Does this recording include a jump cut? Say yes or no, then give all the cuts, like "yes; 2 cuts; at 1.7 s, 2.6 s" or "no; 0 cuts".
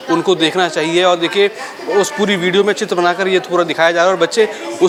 no; 0 cuts